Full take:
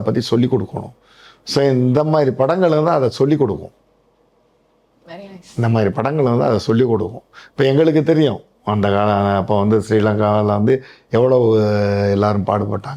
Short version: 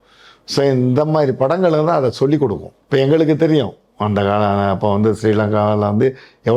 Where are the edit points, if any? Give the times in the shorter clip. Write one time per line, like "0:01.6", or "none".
0:02.7